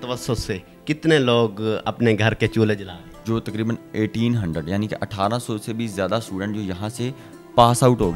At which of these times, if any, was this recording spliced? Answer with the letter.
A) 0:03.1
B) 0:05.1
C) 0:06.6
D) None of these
A